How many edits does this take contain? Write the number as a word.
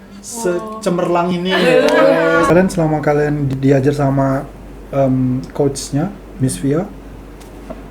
one